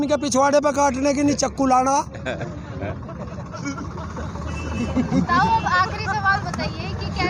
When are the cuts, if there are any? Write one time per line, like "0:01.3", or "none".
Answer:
none